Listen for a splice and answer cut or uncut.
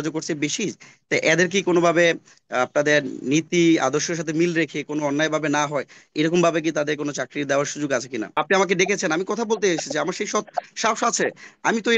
cut